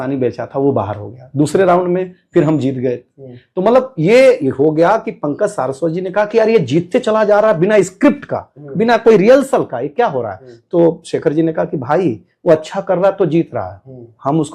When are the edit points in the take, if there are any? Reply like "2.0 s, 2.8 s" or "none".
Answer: none